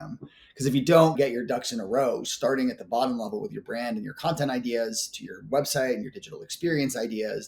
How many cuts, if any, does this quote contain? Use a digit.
0